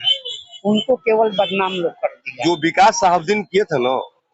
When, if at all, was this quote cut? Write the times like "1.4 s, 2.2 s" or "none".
2.4 s

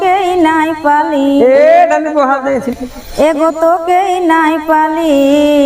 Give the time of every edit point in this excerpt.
none

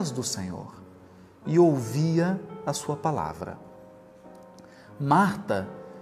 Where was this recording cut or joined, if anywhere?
3.1 s

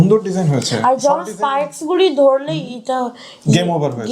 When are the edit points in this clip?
none

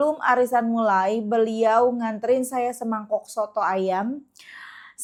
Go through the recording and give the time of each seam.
none

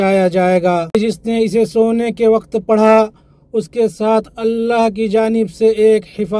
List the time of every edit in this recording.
0.9 s

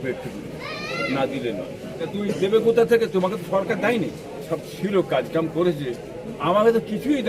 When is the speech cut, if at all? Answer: 2.1 s, 4.5 s

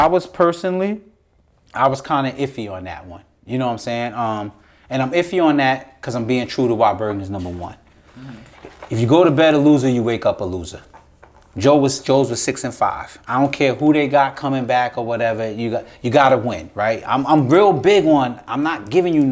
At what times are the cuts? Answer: none

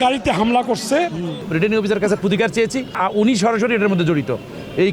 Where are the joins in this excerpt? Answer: 1.4 s, 3.0 s

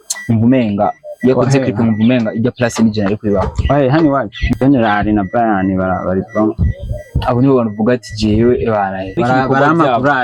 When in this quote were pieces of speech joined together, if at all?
4.4 s, 9.2 s

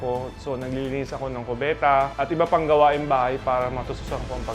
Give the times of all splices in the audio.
2.1 s

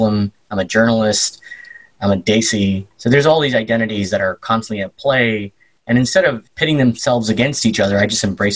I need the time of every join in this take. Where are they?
2.9 s

